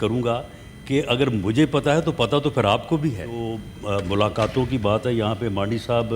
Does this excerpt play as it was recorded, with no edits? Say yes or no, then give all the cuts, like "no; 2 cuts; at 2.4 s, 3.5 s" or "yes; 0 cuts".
no; 1 cut; at 3.7 s